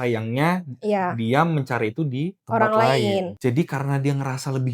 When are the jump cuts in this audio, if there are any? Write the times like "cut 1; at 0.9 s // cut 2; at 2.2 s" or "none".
cut 1; at 2.4 s // cut 2; at 3.3 s